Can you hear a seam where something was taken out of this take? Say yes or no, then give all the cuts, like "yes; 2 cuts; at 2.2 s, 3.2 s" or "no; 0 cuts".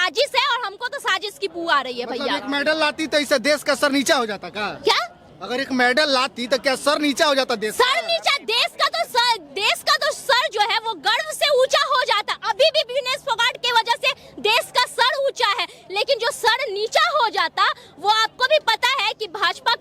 no; 0 cuts